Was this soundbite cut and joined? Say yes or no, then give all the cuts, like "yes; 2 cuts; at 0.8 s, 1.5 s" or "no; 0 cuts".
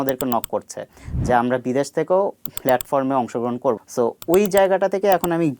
yes; 1 cut; at 3.8 s